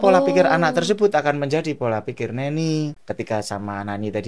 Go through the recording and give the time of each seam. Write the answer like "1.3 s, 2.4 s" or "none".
3.0 s